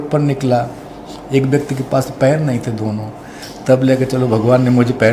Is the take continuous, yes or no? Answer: yes